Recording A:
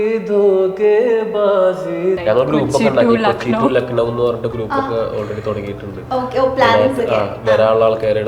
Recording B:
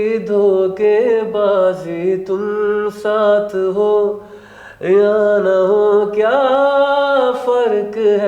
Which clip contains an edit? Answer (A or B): A